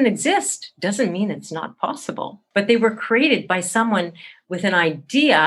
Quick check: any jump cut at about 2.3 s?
yes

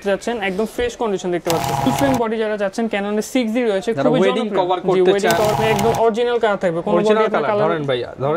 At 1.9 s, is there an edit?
yes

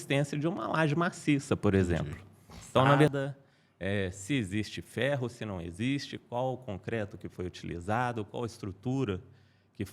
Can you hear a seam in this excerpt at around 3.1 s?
yes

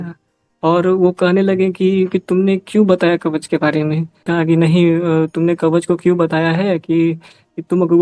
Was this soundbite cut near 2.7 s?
no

